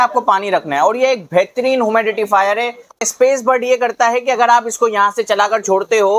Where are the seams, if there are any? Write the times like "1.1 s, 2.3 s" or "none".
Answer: 3.0 s

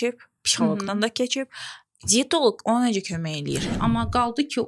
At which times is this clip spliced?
3.7 s

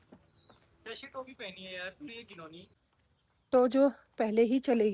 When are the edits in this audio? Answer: 3.2 s

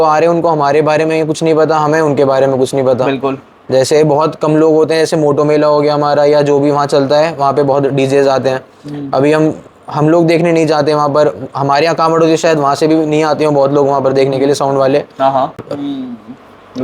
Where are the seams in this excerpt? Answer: 15.5 s

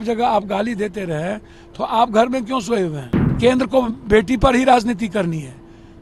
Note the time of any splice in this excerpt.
3.3 s

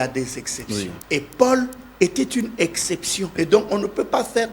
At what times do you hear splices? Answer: 1.0 s, 3.3 s

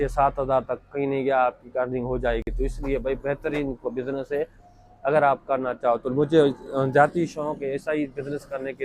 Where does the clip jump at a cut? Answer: none

